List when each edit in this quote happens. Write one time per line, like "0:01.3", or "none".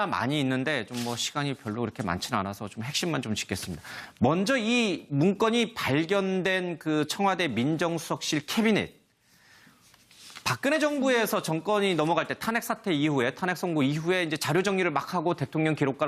0:07.1